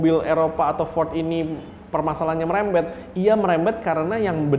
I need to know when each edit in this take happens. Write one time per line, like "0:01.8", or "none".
none